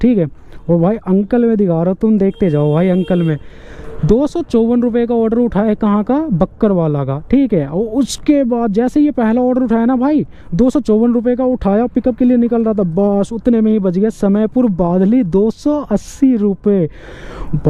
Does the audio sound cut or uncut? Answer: uncut